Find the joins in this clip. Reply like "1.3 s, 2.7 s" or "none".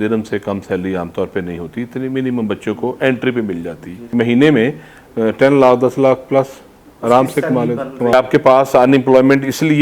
4.0 s, 8.1 s